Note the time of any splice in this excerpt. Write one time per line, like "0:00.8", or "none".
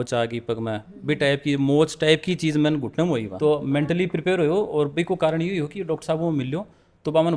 0:03.3